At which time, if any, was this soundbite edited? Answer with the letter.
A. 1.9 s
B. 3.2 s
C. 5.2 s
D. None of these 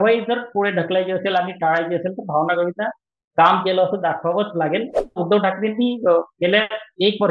C